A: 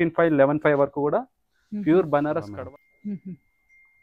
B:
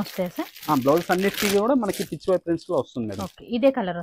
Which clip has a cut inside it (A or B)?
A